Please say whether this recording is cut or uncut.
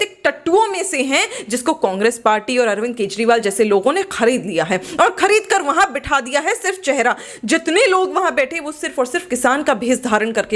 uncut